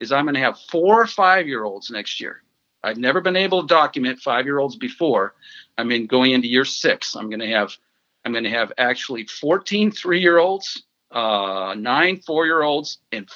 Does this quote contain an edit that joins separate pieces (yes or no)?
no